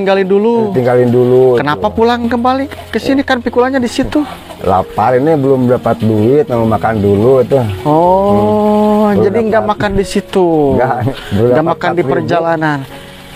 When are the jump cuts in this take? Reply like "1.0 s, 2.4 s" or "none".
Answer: none